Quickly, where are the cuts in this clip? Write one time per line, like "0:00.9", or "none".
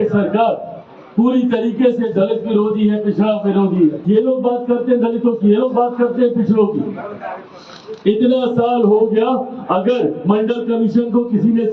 0:04.0